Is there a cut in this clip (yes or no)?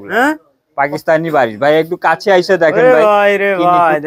no